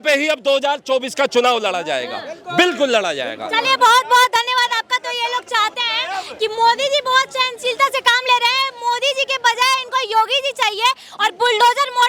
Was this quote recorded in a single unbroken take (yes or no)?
yes